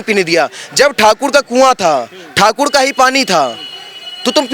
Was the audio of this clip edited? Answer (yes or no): no